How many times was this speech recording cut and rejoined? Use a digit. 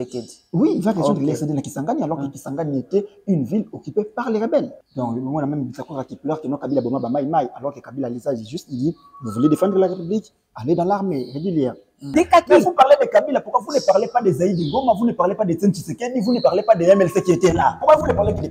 2